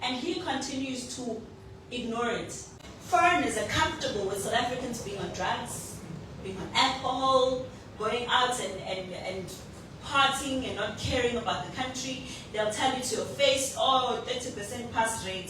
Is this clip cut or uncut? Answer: cut